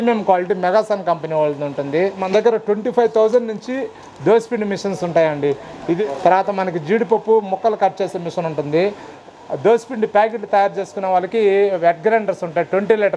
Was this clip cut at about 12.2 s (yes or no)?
no